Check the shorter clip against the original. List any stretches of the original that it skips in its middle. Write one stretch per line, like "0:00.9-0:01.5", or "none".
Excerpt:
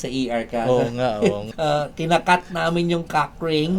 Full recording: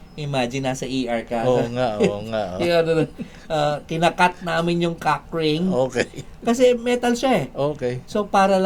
0:02.2-0:03.4